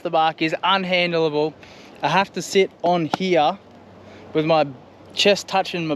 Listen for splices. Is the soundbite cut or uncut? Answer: uncut